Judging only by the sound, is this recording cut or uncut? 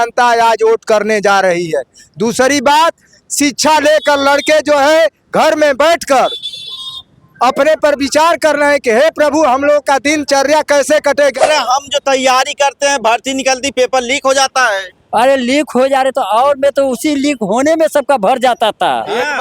cut